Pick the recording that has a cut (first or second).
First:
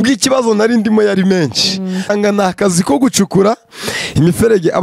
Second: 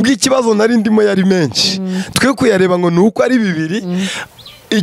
first